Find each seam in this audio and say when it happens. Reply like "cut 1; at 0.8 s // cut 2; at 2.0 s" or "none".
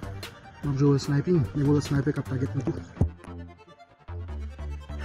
cut 1; at 3.5 s